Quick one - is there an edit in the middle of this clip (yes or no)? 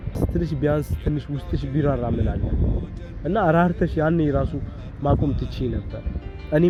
no